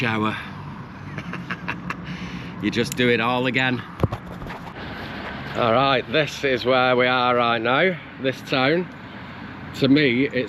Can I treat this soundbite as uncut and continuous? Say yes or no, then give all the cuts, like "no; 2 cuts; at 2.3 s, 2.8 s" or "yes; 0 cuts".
no; 1 cut; at 4.7 s